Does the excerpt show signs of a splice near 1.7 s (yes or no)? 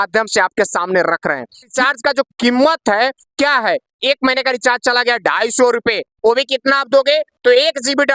yes